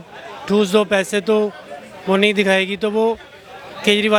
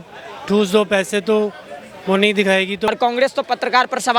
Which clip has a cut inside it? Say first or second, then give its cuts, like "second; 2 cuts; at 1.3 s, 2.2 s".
second; 1 cut; at 2.9 s